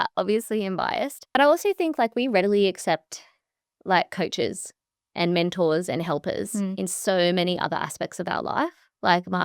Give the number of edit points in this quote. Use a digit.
1